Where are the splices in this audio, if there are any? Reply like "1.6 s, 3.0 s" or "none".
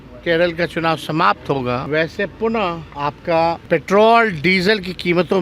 1.8 s, 2.9 s, 3.6 s